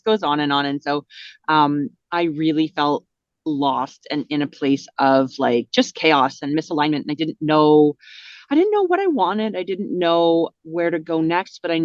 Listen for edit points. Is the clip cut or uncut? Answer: uncut